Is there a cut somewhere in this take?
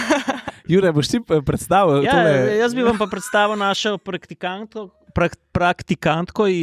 no; 0 cuts

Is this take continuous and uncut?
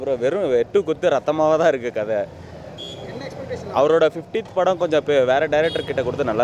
yes; 0 cuts

